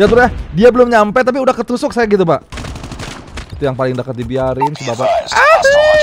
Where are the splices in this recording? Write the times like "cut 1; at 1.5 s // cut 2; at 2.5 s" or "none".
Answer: cut 1; at 2.5 s